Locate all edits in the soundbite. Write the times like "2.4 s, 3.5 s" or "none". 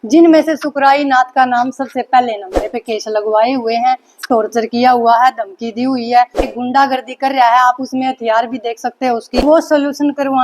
2.6 s, 6.5 s, 9.4 s